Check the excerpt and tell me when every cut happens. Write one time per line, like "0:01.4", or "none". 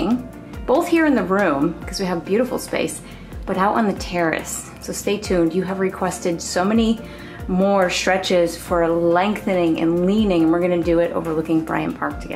none